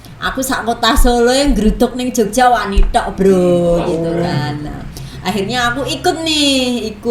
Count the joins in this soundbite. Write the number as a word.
zero